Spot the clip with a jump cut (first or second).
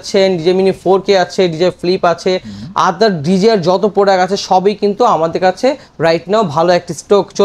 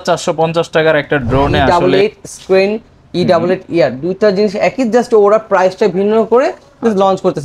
second